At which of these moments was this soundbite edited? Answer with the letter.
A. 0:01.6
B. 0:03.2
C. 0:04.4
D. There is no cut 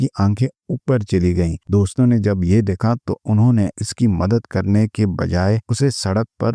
A